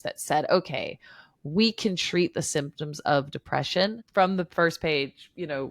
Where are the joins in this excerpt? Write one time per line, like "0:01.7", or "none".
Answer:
0:04.0